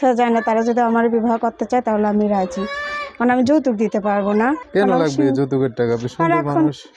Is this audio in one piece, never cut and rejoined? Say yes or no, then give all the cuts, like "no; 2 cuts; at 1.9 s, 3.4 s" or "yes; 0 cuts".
no; 1 cut; at 4.6 s